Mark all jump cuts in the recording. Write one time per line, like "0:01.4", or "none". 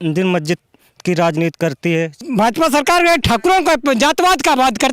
0:02.1